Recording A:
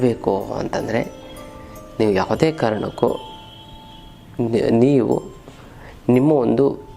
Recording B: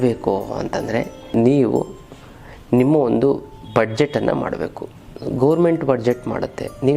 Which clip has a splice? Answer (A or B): B